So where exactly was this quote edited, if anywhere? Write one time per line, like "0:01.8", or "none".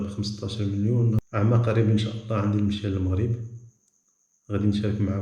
0:01.2